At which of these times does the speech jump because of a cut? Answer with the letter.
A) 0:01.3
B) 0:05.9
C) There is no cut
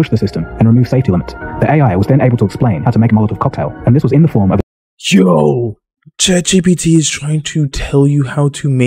C